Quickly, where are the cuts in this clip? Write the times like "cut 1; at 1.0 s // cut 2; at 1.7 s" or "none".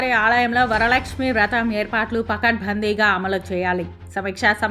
none

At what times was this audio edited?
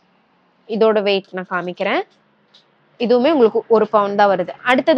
none

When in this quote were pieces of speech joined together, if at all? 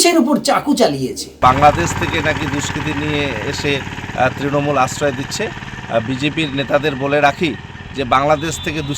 cut 1; at 1.3 s

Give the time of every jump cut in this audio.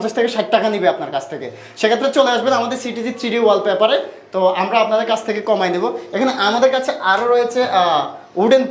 none

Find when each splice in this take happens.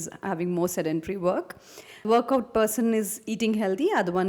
cut 1; at 2.1 s

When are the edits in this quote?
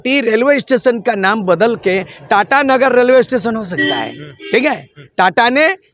none

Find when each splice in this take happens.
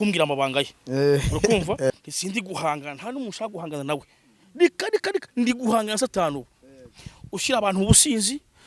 cut 1; at 1.9 s

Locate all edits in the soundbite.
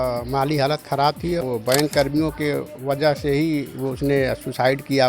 cut 1; at 1.4 s

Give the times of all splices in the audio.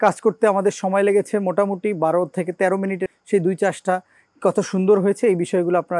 cut 1; at 3.1 s

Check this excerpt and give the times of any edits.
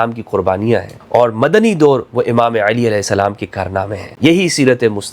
cut 1; at 0.9 s // cut 2; at 4.0 s

